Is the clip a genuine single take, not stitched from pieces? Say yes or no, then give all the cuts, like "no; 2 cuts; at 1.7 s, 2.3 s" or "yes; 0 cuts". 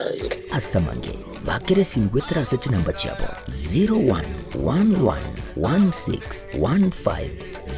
yes; 0 cuts